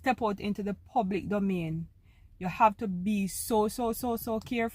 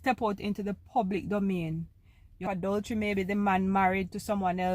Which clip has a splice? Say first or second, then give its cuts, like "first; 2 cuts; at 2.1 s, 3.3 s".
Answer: second; 1 cut; at 2.5 s